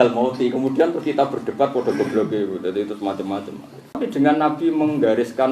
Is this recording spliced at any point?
yes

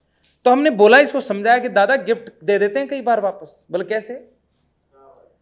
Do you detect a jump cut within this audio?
no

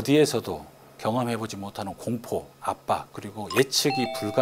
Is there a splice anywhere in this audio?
no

